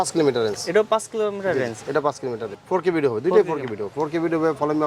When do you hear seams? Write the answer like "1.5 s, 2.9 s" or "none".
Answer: 2.5 s